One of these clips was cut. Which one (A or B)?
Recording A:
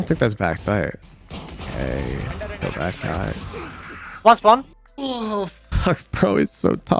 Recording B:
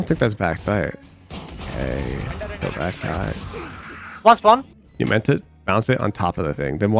B